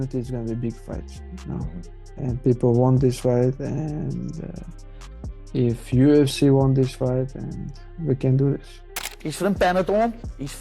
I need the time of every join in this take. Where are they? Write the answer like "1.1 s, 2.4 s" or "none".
9.0 s